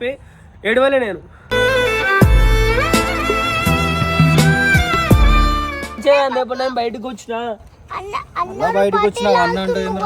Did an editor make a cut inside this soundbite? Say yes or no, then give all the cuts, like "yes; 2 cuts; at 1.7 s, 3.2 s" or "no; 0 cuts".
yes; 1 cut; at 5.9 s